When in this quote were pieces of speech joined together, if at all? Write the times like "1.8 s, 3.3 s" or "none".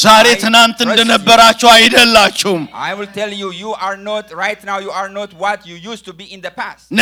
none